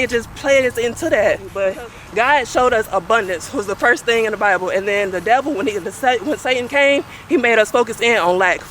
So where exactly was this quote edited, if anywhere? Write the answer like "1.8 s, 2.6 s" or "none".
1.6 s